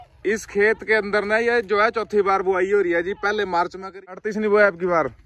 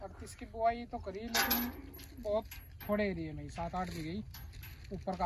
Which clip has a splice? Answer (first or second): first